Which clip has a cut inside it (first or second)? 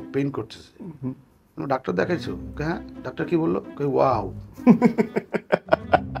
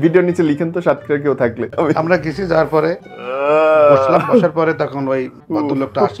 second